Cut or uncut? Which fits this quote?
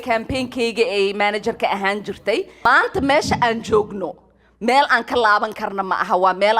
cut